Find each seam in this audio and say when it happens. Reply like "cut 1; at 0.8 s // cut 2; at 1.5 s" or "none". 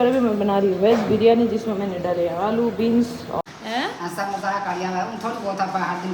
cut 1; at 3.4 s